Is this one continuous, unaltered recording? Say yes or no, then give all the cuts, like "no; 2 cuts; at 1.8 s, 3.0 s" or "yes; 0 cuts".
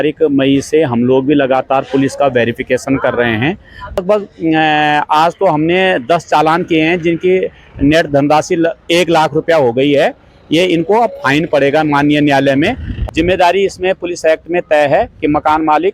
no; 2 cuts; at 4.0 s, 12.9 s